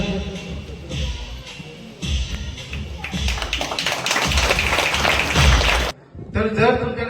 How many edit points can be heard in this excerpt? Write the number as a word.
one